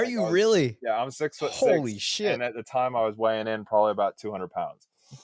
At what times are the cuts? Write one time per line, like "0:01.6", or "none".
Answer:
none